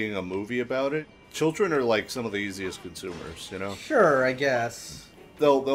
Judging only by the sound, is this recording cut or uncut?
cut